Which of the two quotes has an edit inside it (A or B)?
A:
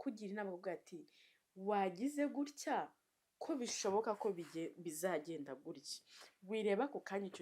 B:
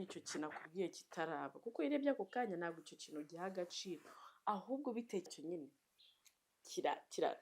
B